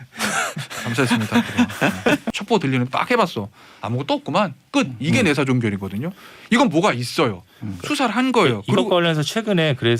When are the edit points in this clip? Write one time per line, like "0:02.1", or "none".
0:02.3